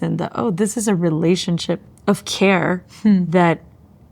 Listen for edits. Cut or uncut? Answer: cut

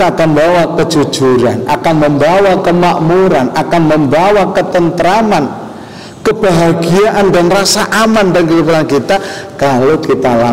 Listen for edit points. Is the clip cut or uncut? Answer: uncut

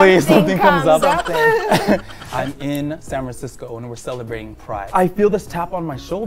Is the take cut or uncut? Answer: cut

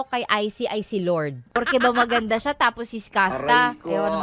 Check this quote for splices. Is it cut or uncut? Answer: cut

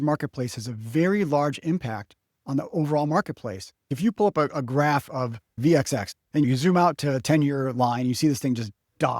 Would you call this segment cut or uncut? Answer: cut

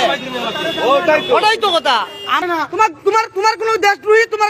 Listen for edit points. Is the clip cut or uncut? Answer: cut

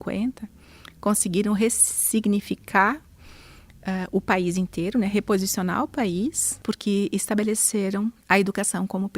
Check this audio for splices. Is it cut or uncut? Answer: cut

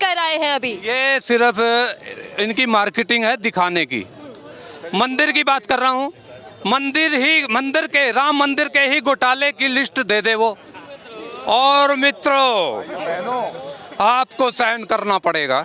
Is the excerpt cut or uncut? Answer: cut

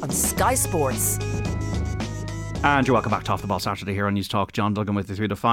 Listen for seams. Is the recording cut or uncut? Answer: uncut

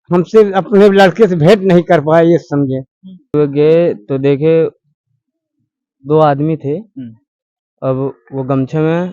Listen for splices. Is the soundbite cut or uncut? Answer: cut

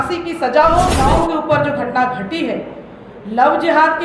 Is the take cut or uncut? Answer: cut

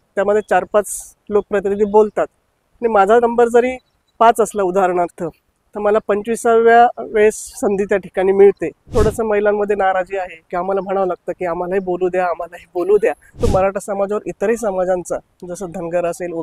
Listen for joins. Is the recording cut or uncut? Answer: cut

